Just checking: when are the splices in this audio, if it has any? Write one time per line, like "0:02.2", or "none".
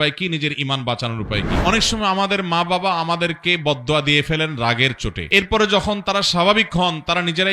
0:01.6